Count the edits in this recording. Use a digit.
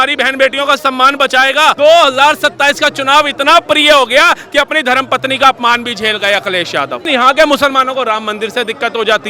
2